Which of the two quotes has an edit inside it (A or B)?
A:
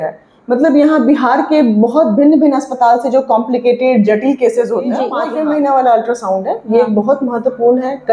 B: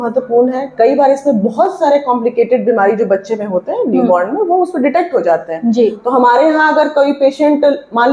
A